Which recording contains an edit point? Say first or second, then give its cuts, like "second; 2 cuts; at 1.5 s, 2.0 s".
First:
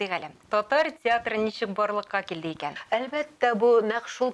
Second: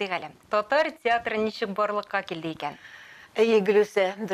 first; 1 cut; at 2.7 s